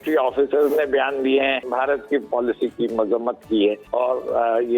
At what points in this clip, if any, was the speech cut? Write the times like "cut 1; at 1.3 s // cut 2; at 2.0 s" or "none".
cut 1; at 2.0 s // cut 2; at 3.8 s